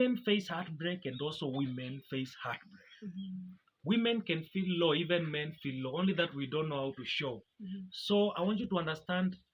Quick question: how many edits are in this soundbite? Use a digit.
0